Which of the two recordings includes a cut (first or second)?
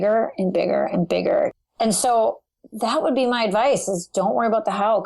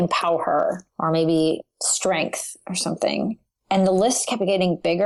first